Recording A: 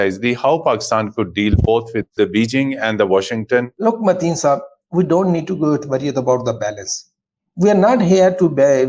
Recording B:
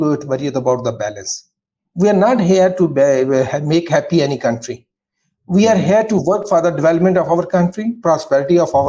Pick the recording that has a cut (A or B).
A